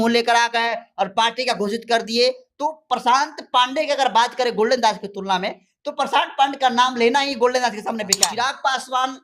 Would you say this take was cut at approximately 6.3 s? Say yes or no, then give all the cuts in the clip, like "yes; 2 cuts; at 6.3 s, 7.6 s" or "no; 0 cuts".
no; 1 cut; at 8.2 s